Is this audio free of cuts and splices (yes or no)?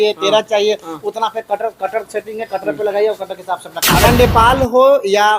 no